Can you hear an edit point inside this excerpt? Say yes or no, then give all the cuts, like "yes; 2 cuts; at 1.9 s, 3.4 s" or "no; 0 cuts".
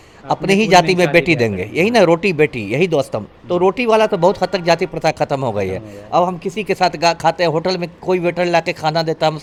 no; 0 cuts